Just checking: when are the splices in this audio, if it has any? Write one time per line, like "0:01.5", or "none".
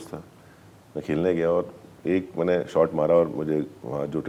none